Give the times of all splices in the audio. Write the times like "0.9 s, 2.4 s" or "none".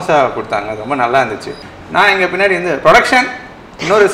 1.5 s